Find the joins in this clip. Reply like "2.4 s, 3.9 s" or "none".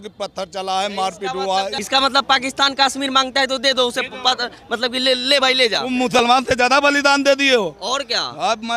1.7 s, 5.8 s

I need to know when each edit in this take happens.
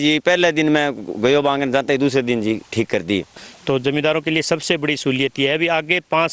3.3 s

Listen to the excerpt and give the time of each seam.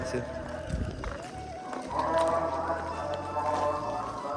none

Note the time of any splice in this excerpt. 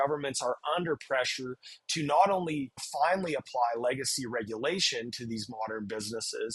2.8 s

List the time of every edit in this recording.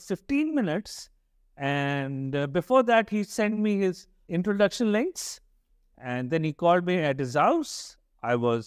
4.1 s

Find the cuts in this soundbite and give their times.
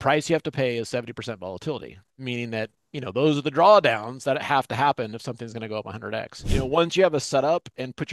6.5 s

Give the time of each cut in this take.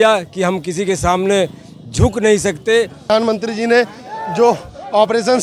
3.1 s

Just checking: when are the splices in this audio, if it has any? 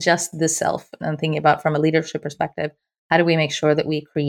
0.9 s

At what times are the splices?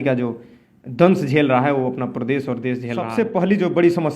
3.1 s

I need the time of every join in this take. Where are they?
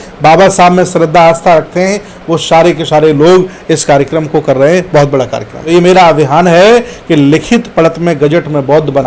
5.5 s

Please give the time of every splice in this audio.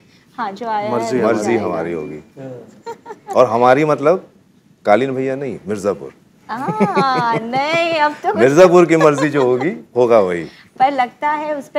none

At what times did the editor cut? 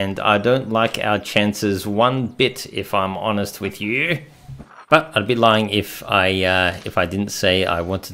none

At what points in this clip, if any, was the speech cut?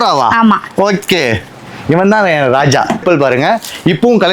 3.0 s

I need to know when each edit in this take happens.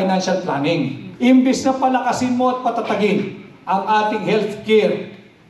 1.0 s

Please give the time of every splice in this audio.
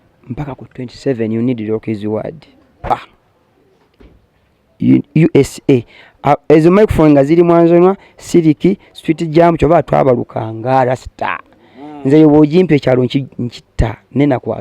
2.9 s

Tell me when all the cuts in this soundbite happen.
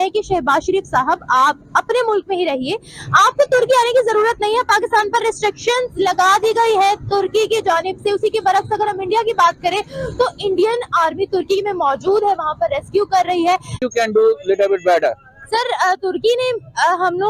none

